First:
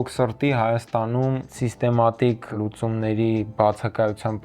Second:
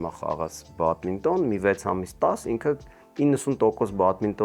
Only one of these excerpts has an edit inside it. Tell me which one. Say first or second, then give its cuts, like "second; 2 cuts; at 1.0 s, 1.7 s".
first; 2 cuts; at 1.5 s, 2.5 s